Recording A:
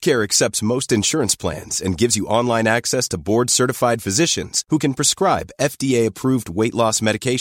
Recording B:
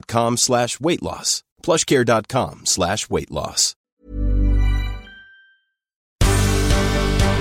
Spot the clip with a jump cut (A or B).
B